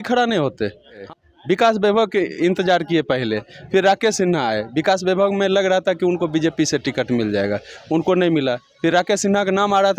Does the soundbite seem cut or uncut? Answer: cut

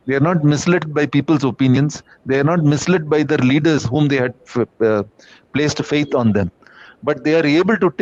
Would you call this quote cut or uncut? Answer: uncut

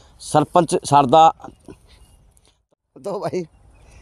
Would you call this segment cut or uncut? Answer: cut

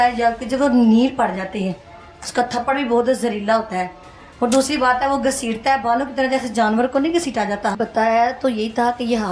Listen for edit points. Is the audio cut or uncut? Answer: cut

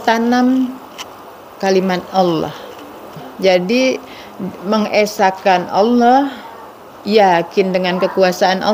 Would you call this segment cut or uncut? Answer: cut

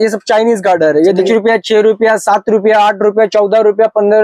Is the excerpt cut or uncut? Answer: cut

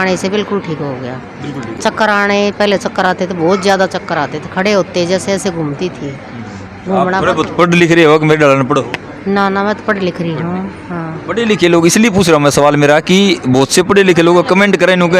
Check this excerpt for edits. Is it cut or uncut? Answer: uncut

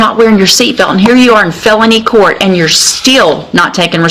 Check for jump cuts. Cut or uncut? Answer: uncut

